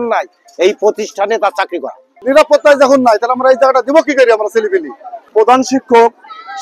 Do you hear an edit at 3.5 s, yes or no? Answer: no